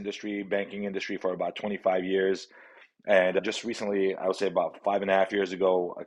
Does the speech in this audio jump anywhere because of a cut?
no; 0 cuts

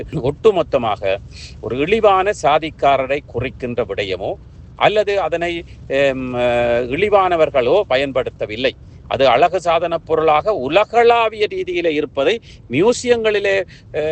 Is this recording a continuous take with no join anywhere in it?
yes; 0 cuts

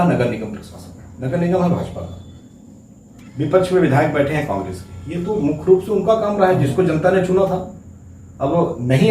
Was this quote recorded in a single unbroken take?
yes; 0 cuts

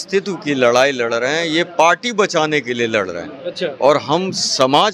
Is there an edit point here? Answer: no; 0 cuts

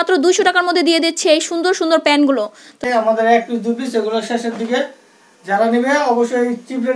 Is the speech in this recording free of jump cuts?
no; 1 cut; at 2.8 s

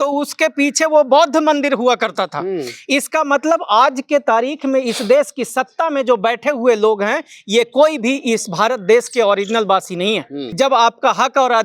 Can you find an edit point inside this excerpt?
yes; 1 cut; at 10.5 s

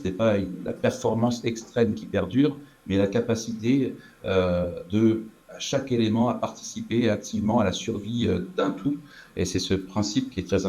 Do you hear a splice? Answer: no; 0 cuts

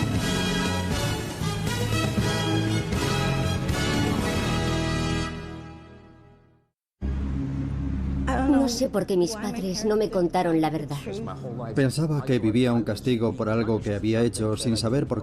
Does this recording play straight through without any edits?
no; 1 cut; at 3.4 s

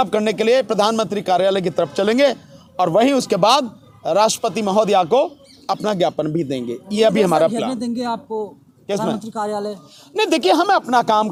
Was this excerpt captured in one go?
yes; 0 cuts

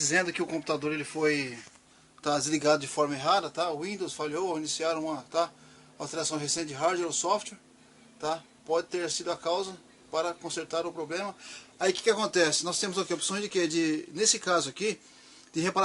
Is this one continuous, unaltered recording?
no; 1 cut; at 10.0 s

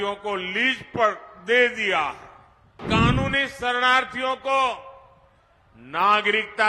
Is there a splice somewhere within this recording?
yes; 1 cut; at 2.8 s

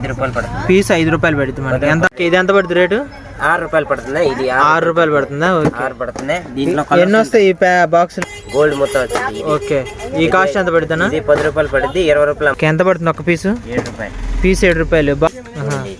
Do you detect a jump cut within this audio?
yes; 4 cuts; at 2.1 s, 8.2 s, 12.6 s, 15.3 s

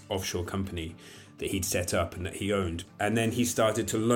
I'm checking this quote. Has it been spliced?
yes; 1 cut; at 2.8 s

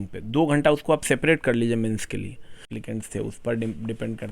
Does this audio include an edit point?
yes; 1 cut; at 2.7 s

